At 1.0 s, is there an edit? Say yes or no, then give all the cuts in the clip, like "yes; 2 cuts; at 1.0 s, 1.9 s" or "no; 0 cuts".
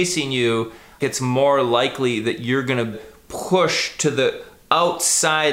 yes; 2 cuts; at 1.0 s, 3.1 s